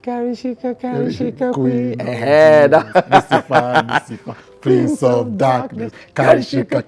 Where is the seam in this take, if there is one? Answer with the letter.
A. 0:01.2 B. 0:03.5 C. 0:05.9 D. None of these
D